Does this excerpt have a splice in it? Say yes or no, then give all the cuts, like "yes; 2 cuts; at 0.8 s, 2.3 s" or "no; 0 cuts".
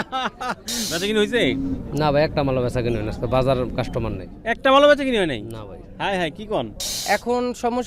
yes; 2 cuts; at 0.9 s, 6.9 s